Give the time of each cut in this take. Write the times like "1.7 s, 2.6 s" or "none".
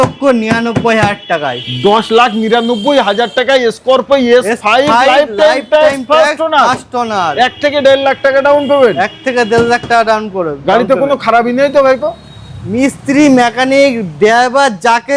none